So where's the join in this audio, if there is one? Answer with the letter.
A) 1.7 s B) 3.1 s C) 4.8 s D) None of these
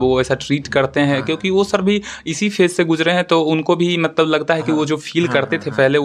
D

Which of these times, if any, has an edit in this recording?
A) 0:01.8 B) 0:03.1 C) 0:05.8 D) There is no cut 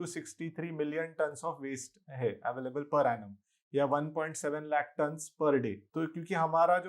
C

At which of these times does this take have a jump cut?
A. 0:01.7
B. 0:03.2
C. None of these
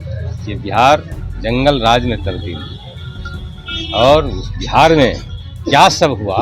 C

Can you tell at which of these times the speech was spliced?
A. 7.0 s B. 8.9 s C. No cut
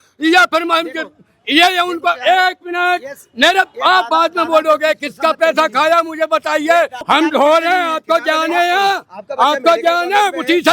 A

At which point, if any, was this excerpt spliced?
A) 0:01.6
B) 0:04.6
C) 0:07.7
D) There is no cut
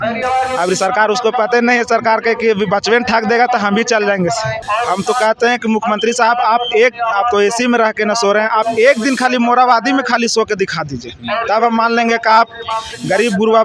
B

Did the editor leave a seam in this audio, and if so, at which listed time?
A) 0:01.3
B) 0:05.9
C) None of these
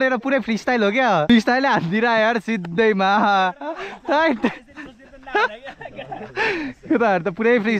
A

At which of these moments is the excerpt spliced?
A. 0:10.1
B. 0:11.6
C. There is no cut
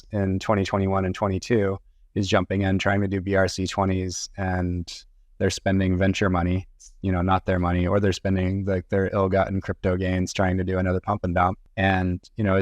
B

